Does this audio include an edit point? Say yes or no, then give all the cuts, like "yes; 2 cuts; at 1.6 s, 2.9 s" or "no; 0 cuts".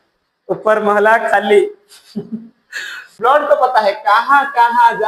yes; 1 cut; at 3.2 s